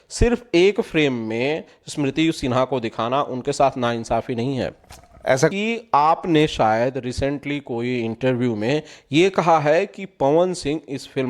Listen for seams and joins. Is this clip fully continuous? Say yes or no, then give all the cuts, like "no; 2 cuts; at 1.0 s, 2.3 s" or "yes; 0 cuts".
no; 1 cut; at 5.5 s